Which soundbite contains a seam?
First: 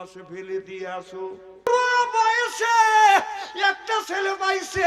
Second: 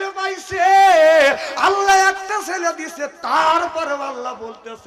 first; 1 cut; at 1.7 s

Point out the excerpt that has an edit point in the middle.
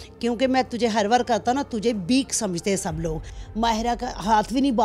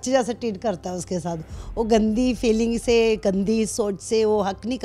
first; 1 cut; at 3.4 s

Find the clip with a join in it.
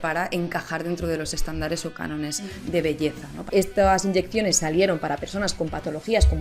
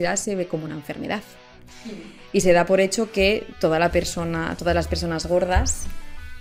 first; 1 cut; at 3.4 s

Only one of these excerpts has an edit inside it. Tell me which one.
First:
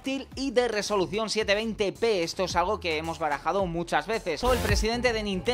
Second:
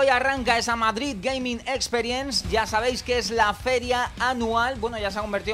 first; 1 cut; at 4.4 s

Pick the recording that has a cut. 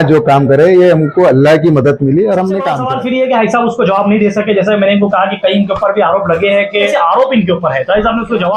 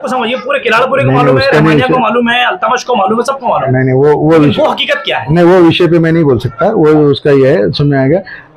first; 2 cuts; at 2.8 s, 6.9 s

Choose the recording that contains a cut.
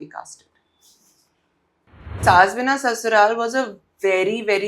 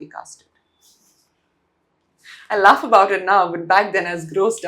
first; 1 cut; at 2.2 s

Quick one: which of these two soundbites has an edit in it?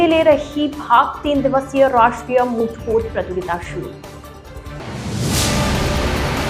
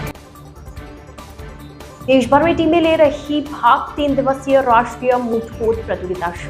second; 1 cut; at 1.7 s

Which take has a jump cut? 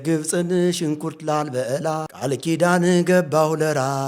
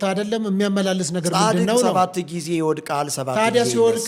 first; 1 cut; at 2.1 s

